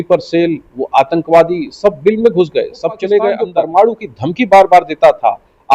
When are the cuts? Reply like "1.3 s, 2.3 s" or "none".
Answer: 3.4 s